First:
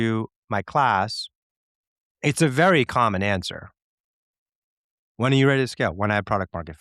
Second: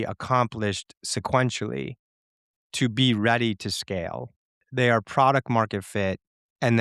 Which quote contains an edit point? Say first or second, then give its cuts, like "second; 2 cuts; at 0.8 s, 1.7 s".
second; 1 cut; at 4.7 s